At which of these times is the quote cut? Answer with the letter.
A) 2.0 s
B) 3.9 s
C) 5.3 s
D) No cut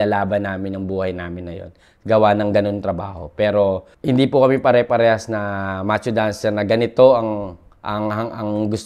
B